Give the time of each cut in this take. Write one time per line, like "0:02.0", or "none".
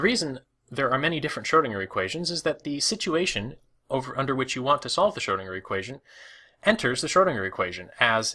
0:06.0